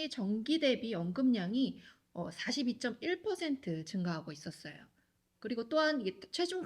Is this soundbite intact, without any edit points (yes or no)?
yes